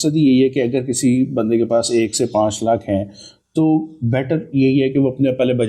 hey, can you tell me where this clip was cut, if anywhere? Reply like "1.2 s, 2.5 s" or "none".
none